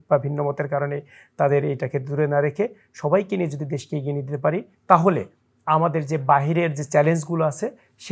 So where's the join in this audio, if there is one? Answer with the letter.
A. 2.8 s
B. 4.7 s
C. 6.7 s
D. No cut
B